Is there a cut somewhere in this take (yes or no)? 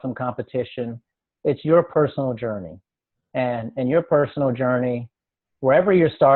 no